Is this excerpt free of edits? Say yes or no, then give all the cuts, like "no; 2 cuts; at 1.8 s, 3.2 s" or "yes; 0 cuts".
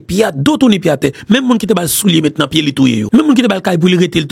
no; 1 cut; at 3.0 s